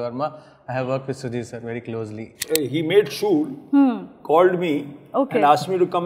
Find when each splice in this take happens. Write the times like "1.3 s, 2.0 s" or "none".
2.3 s

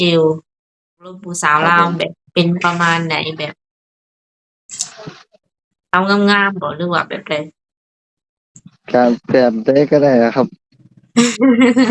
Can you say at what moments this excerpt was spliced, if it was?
1.3 s

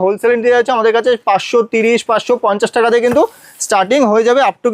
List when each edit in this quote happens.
none

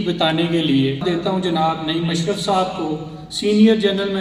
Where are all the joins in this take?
none

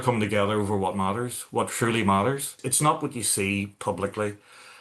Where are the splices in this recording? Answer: 2.6 s

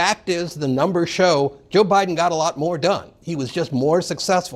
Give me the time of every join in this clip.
none

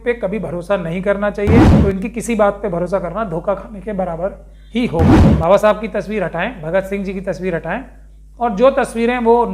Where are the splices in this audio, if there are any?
1.7 s, 5.2 s

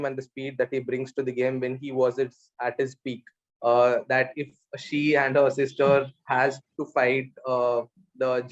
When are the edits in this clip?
3.4 s

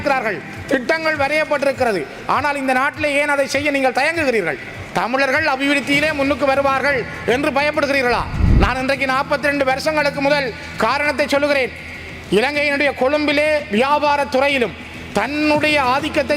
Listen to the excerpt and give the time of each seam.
none

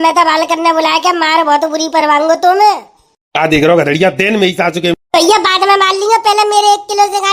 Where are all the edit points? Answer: none

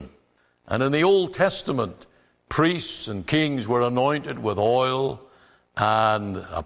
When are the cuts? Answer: none

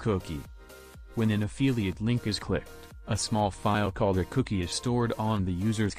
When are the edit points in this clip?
none

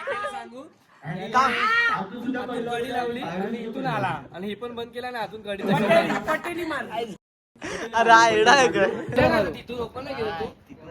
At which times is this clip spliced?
9.2 s

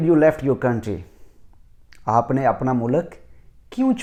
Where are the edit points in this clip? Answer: none

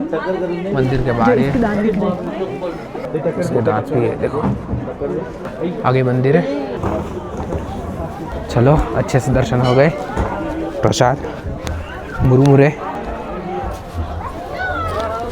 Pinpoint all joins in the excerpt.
none

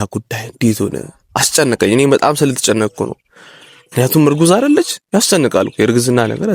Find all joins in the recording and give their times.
none

